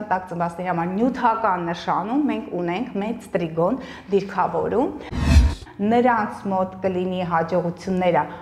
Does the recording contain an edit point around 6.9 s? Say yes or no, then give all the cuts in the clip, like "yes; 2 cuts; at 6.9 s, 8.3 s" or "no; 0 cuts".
no; 1 cut; at 5.2 s